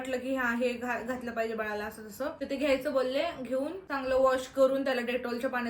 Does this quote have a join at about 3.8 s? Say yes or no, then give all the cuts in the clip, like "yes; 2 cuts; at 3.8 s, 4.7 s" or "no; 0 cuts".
yes; 2 cuts; at 2.4 s, 3.8 s